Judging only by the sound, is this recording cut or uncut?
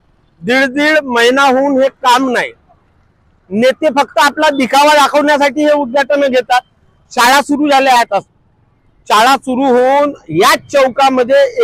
uncut